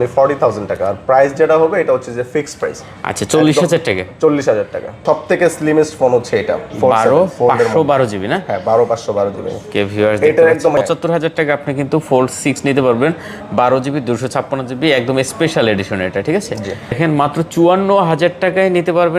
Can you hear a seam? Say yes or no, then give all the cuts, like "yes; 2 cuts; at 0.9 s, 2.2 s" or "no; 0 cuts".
yes; 3 cuts; at 5.0 s, 10.8 s, 16.9 s